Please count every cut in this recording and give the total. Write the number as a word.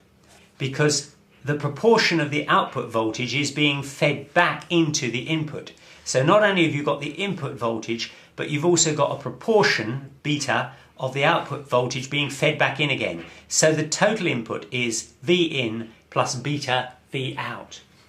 zero